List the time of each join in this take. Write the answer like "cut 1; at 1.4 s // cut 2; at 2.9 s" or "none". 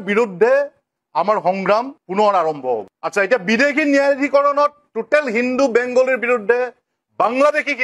cut 1; at 2.9 s

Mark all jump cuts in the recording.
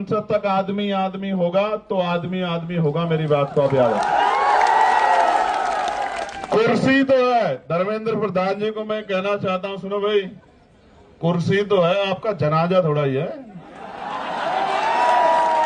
cut 1; at 6.3 s

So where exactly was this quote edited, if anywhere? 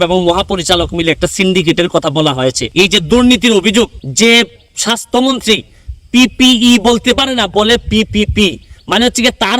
cut 1; at 2.6 s // cut 2; at 4.0 s

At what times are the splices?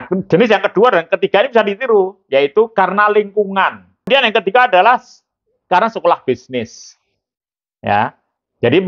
cut 1; at 4.1 s

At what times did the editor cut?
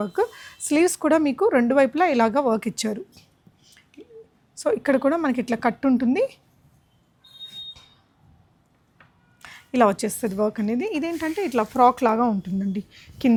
none

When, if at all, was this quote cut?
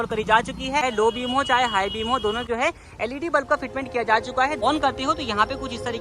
cut 1; at 0.8 s // cut 2; at 2.4 s // cut 3; at 4.6 s

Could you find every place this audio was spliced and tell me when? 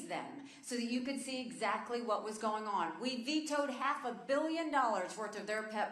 cut 1; at 4.0 s

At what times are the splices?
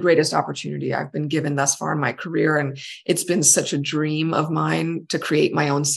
none

